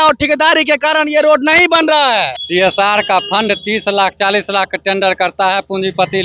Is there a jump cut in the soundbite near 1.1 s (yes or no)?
no